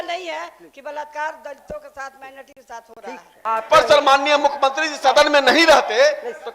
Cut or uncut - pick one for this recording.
cut